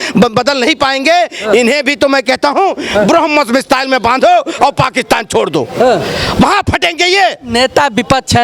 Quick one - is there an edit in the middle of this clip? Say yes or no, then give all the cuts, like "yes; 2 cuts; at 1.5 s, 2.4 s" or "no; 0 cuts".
no; 0 cuts